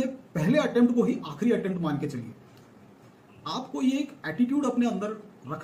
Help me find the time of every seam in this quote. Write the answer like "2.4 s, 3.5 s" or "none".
2.9 s